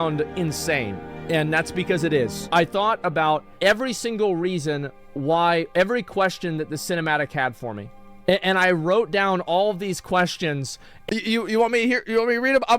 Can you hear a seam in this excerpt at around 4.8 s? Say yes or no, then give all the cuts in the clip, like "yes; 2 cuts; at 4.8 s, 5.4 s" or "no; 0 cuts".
no; 3 cuts; at 2.4 s, 3.5 s, 10.9 s